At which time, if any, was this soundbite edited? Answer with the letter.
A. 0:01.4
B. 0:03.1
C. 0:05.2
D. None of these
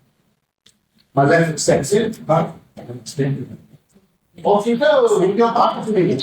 D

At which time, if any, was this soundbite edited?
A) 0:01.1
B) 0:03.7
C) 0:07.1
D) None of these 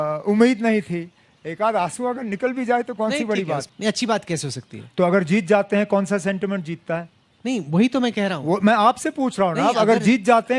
B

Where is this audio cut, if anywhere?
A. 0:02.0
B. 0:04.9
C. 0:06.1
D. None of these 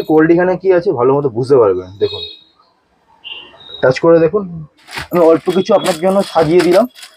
B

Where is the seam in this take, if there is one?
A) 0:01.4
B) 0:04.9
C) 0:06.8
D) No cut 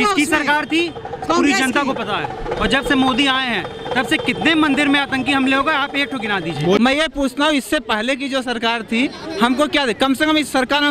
C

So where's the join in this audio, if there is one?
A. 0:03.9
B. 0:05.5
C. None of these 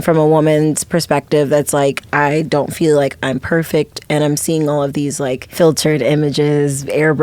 B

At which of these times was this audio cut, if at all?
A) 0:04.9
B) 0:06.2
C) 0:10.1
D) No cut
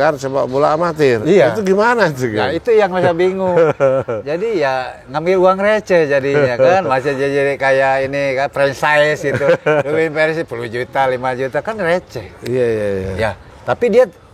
D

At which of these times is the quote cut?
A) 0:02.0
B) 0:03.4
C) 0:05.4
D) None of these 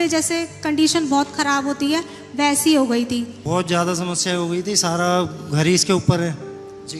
D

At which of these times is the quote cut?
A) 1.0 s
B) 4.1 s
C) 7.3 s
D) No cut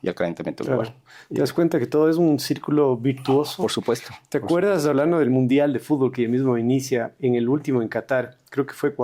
D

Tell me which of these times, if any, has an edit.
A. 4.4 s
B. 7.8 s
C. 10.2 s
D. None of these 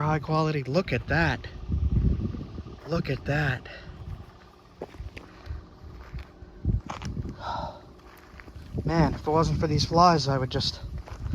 D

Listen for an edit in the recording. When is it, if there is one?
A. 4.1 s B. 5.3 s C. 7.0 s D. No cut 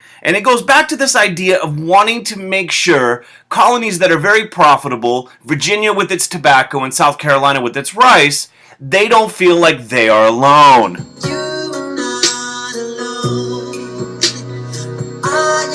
B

